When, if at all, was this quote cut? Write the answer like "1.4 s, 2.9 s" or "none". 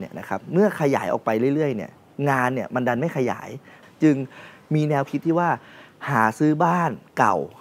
3.8 s